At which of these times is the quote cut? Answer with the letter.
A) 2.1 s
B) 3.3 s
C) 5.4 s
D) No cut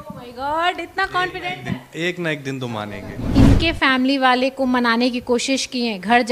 B